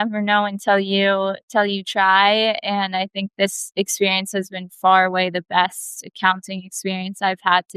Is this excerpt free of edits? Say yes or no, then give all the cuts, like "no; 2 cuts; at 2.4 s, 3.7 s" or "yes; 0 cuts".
yes; 0 cuts